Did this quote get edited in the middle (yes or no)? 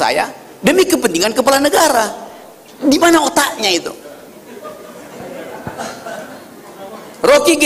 no